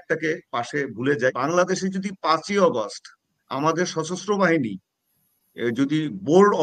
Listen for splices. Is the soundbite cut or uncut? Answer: cut